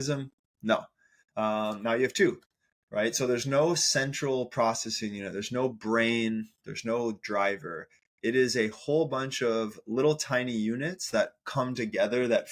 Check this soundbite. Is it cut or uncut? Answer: uncut